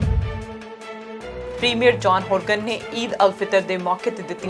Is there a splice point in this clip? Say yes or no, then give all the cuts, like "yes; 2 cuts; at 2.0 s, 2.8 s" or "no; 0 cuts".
yes; 1 cut; at 1.5 s